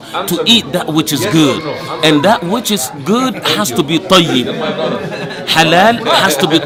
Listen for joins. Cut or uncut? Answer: uncut